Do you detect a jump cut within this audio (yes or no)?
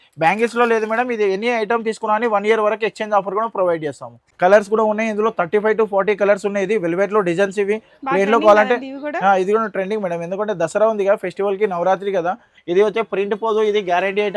yes